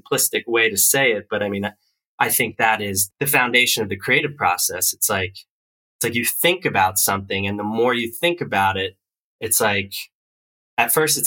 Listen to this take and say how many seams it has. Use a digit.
1